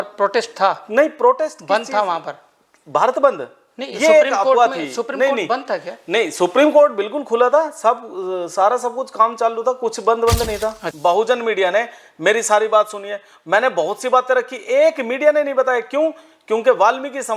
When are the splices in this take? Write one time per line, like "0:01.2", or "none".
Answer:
0:10.9